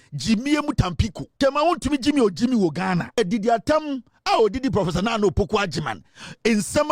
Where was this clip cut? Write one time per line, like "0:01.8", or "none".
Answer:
0:01.2
0:03.2